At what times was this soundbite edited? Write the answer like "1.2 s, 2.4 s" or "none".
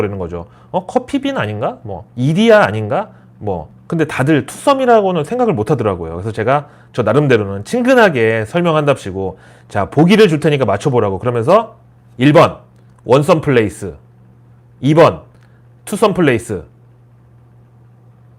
3.6 s